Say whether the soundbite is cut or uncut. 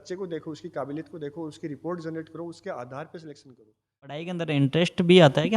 cut